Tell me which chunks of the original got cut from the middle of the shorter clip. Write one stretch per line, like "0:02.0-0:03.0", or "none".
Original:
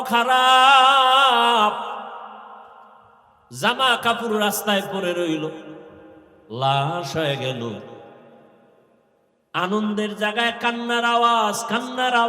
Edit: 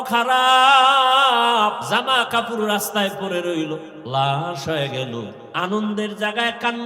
0:01.8-0:03.5
0:05.7-0:06.4
0:07.9-0:09.4